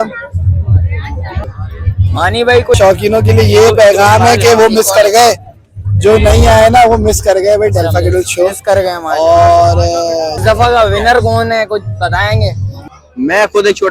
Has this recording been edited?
yes; 3 cuts; at 2.7 s, 10.4 s, 12.7 s

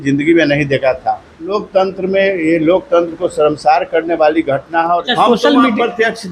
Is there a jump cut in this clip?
yes; 2 cuts; at 1.6 s, 5.0 s

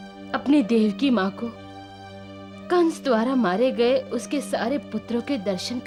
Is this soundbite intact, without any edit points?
yes; 0 cuts

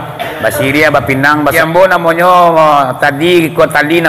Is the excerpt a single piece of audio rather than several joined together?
no; 1 cut; at 1.5 s

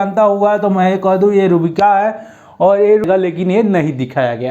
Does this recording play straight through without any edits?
no; 1 cut; at 3.0 s

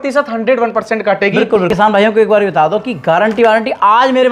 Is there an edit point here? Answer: yes; 1 cut; at 1.7 s

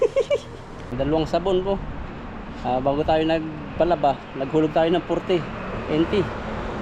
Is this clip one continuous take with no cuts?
no; 1 cut; at 0.9 s

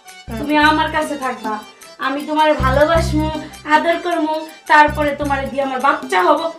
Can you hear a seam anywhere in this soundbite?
no; 0 cuts

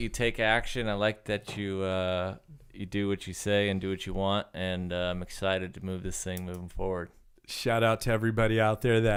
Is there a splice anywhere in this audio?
no; 0 cuts

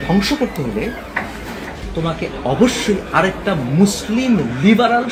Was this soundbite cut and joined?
no; 0 cuts

